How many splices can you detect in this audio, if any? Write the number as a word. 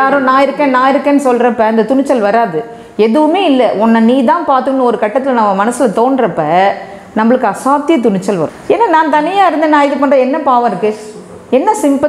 one